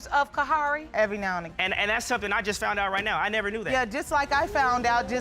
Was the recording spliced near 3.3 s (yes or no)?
no